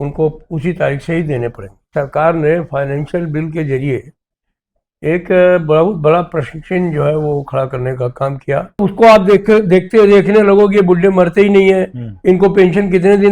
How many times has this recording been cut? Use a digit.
2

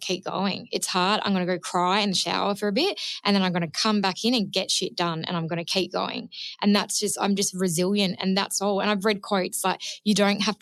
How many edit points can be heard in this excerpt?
0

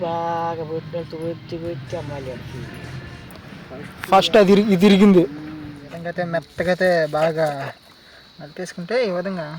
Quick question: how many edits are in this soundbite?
1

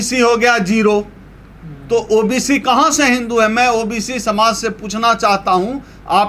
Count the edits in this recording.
0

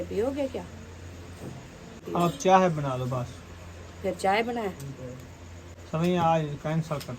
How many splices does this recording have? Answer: 1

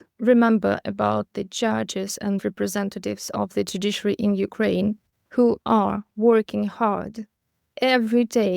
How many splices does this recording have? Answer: 1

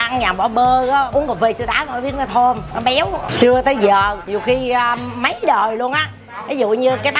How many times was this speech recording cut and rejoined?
3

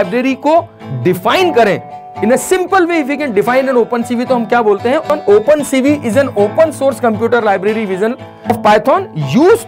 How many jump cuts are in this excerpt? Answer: 2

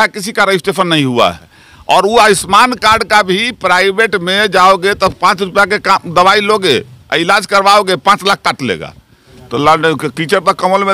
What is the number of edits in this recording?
2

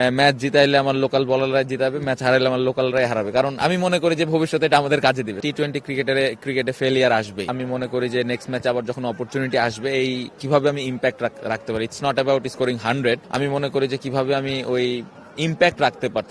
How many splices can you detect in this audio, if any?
3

